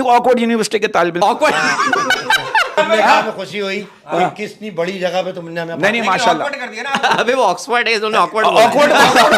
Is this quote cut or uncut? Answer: cut